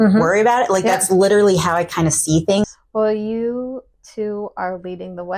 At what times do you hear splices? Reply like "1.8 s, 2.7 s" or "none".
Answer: 2.7 s

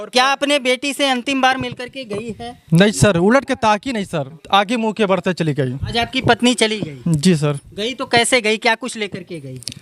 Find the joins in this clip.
4.4 s, 5.8 s

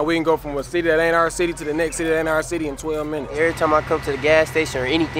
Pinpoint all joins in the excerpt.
3.3 s

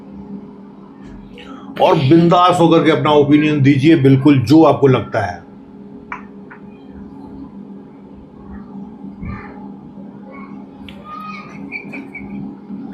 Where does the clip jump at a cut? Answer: 1.3 s, 11.1 s

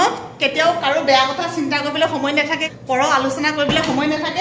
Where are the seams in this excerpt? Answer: 2.7 s

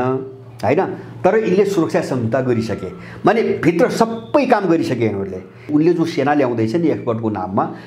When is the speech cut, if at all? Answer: 5.7 s

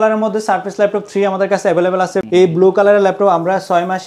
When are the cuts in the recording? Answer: 2.3 s

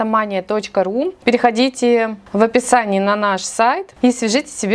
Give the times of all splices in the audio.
1.2 s, 2.2 s, 3.9 s

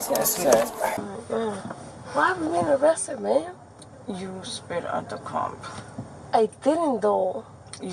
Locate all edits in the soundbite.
1.0 s

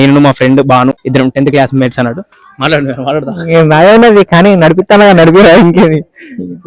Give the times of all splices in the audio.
1.0 s

